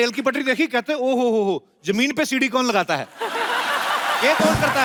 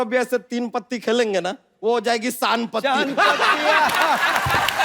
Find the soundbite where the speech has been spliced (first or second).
second